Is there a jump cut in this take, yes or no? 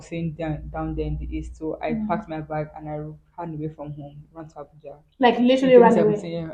no